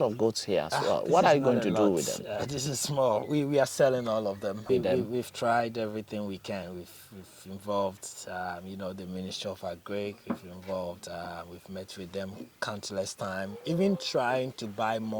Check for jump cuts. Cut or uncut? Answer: cut